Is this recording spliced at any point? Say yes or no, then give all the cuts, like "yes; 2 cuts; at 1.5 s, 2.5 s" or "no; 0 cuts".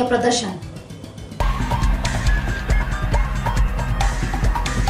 yes; 1 cut; at 1.3 s